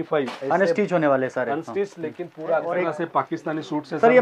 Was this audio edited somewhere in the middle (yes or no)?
yes